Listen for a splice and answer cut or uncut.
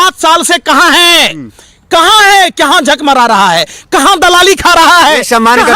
uncut